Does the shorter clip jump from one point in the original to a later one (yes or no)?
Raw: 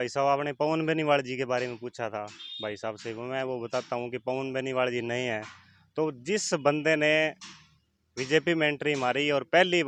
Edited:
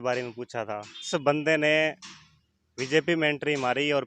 yes